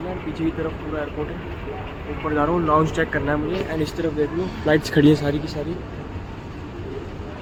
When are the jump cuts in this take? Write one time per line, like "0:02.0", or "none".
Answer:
none